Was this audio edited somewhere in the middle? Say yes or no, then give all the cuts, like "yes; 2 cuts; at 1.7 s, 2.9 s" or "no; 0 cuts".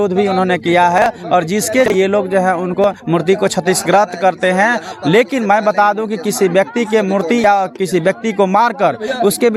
no; 0 cuts